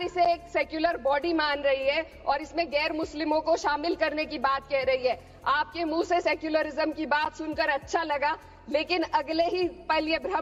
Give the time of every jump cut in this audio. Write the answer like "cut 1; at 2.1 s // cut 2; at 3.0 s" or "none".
none